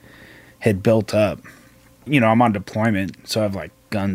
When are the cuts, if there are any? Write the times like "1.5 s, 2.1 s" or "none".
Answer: 2.0 s